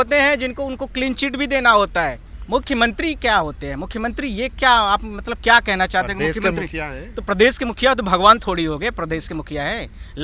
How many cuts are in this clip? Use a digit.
1